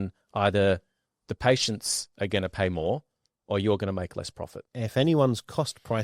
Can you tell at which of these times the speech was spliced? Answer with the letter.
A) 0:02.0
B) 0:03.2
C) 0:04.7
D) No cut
C